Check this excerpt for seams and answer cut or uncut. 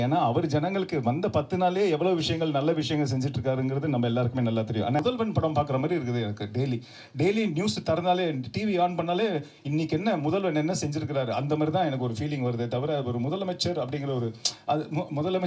cut